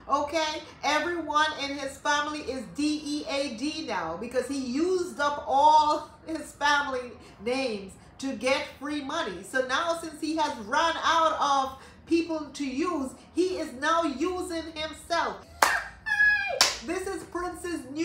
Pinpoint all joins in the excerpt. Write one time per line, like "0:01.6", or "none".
0:15.4

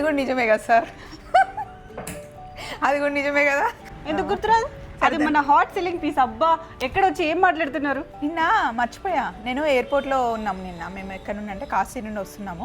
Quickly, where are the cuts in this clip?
0:03.9
0:08.1

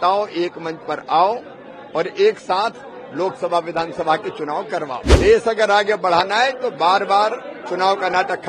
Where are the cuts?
0:05.1

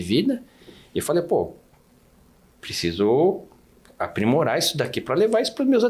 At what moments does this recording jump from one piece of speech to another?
none

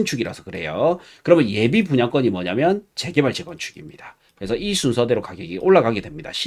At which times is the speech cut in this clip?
none

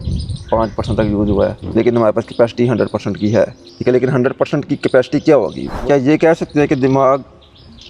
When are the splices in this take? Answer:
0:01.6
0:03.6
0:05.7

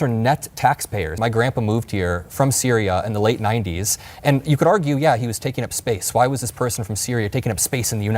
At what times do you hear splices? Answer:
0:01.2

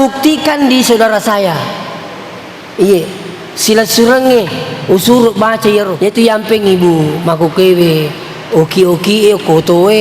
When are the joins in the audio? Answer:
0:05.9

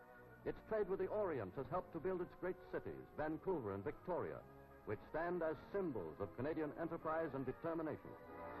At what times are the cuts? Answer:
none

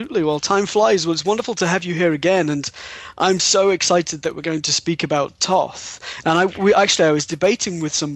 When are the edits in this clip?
0:06.6

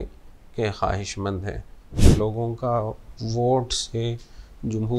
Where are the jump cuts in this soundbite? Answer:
0:02.0

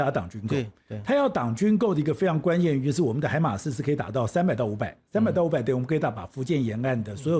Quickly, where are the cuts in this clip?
none

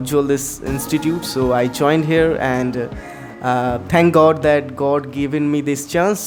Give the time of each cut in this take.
none

